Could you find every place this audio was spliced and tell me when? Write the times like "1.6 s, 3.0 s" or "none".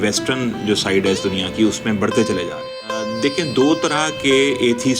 3.1 s